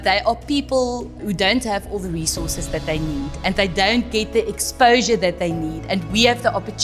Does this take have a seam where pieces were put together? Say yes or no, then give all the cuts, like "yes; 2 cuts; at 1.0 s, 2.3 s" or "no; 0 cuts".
yes; 1 cut; at 1.2 s